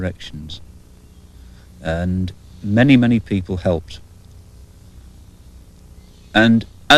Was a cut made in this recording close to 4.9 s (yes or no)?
no